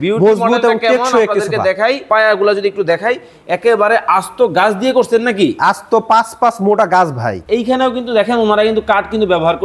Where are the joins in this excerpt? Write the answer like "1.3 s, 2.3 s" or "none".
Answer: 2.0 s, 7.3 s